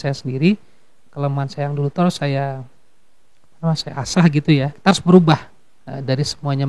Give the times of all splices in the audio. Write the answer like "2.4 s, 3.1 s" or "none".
4.7 s

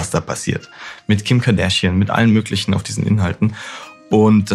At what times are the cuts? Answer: none

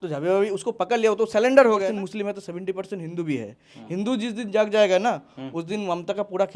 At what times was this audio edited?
1.9 s

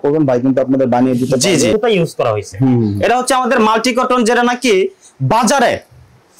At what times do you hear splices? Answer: 1.7 s

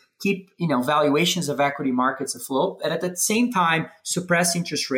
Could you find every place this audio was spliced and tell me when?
none

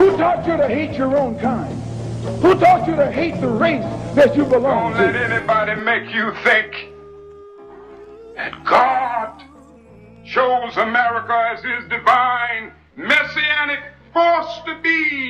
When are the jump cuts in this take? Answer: 5.2 s

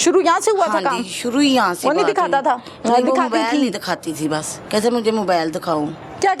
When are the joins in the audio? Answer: 4.6 s

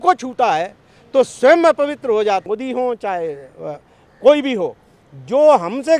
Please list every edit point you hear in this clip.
2.4 s

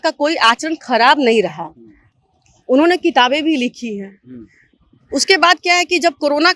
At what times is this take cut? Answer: none

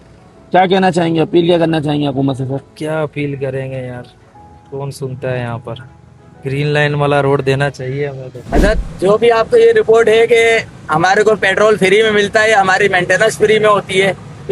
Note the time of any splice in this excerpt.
8.2 s

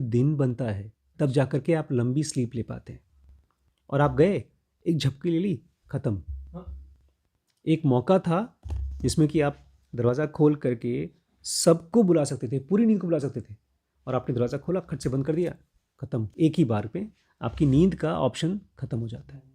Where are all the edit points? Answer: 16.3 s

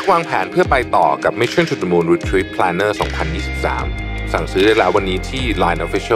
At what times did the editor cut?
none

